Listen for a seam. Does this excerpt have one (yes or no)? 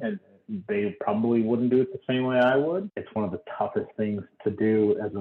yes